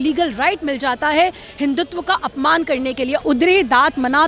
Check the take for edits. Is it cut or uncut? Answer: cut